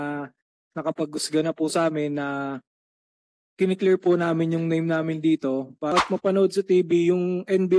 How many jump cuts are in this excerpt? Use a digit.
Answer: 1